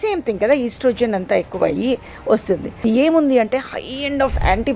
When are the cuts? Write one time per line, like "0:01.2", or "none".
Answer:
0:02.8